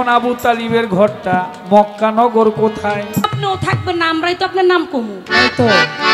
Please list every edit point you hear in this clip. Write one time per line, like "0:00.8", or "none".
0:03.3